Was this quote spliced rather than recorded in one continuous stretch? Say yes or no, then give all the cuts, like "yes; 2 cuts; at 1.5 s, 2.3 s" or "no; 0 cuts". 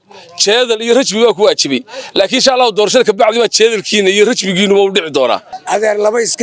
yes; 1 cut; at 5.5 s